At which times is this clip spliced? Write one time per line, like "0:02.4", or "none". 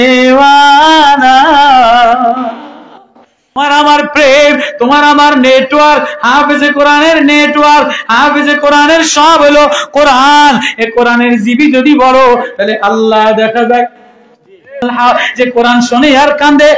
0:03.6
0:14.8